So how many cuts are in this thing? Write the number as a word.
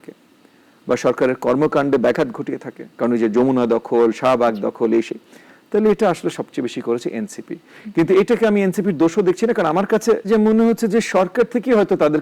one